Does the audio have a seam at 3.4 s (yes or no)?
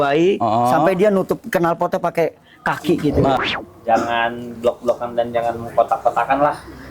yes